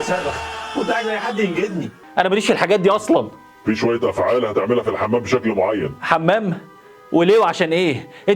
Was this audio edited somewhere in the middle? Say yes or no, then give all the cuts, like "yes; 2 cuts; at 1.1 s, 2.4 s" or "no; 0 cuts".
yes; 1 cut; at 2.0 s